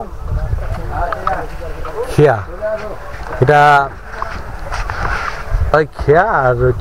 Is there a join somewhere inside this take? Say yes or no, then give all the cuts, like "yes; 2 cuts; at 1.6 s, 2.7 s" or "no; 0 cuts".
yes; 1 cut; at 5.7 s